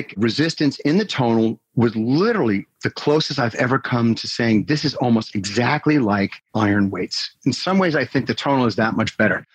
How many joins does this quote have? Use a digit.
2